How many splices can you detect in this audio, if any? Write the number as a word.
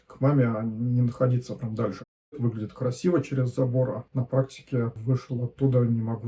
three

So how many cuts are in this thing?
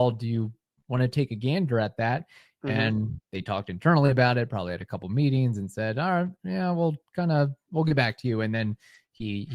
zero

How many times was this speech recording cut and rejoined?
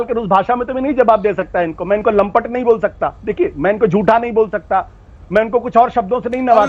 zero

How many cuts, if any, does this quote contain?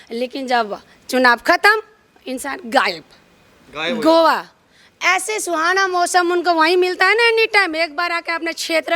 zero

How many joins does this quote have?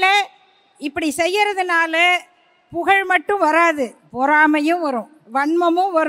two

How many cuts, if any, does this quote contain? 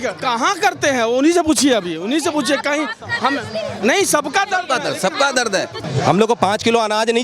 one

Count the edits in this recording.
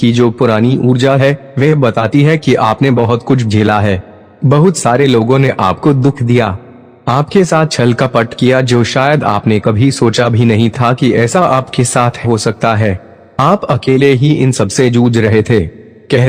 zero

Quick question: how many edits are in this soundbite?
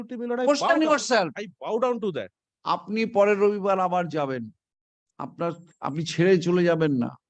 zero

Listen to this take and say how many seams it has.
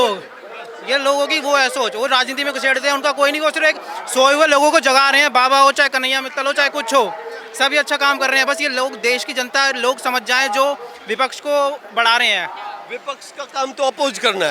zero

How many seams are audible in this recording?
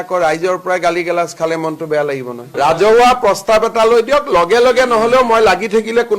one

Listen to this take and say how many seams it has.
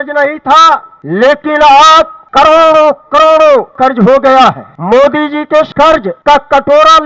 five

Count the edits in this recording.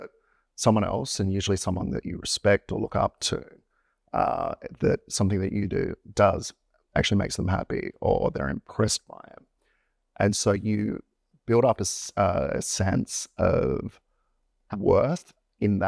zero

